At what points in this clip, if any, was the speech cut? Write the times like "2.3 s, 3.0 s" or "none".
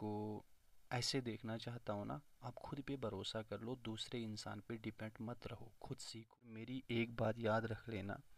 6.6 s